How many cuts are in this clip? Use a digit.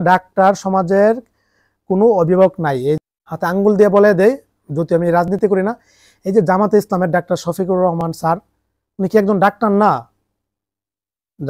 1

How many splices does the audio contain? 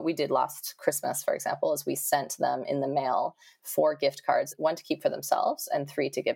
1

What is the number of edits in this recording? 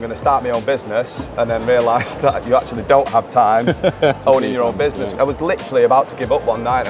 1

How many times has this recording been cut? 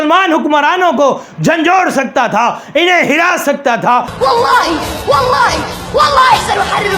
1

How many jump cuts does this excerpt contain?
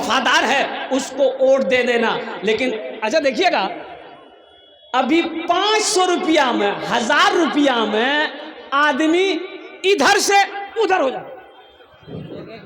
0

